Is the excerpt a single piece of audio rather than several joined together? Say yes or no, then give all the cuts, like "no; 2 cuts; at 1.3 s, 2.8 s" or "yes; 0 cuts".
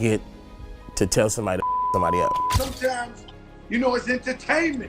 no; 1 cut; at 2.7 s